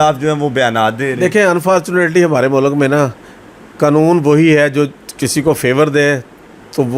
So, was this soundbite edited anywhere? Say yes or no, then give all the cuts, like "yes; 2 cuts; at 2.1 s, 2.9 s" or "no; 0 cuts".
no; 0 cuts